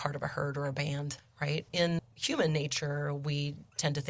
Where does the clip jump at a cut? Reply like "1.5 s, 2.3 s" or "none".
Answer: 1.2 s, 2.1 s